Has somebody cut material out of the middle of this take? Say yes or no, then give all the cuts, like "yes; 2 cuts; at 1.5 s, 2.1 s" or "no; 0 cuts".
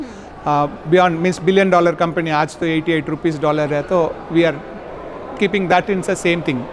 no; 0 cuts